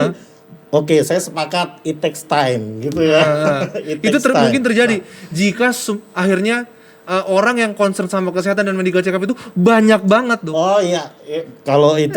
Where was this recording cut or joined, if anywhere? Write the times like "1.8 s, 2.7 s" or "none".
none